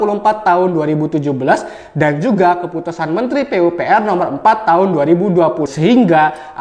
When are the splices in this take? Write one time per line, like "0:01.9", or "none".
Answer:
0:05.7